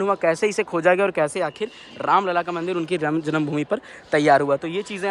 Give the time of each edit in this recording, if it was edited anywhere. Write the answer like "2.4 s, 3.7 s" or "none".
none